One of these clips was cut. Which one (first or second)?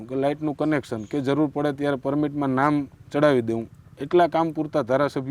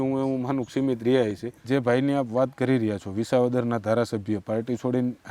second